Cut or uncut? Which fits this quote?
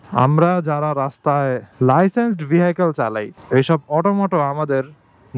cut